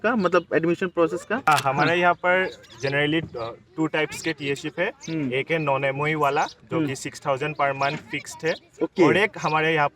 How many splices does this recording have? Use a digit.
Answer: 1